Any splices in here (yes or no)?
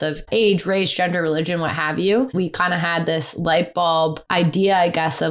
yes